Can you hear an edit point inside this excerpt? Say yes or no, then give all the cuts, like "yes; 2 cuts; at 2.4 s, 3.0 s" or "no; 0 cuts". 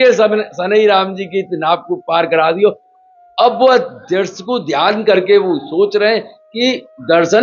no; 0 cuts